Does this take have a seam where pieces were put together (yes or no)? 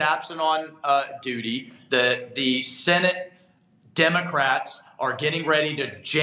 no